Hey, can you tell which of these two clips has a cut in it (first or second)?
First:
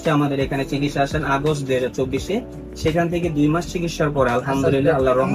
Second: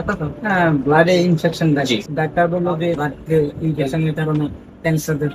second